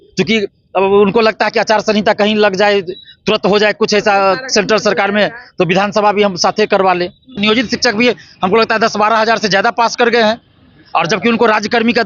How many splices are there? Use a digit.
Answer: 1